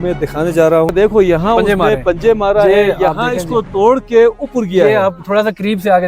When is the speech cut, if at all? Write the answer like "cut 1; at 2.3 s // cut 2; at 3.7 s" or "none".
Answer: cut 1; at 0.9 s